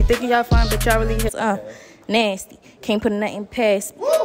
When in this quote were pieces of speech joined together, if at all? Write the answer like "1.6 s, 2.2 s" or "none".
1.3 s